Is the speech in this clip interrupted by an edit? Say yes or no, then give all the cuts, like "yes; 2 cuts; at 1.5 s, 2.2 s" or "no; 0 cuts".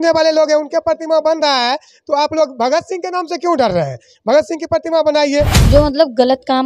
yes; 1 cut; at 5.6 s